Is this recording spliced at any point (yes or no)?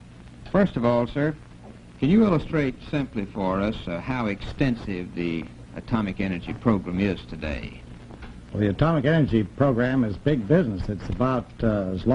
yes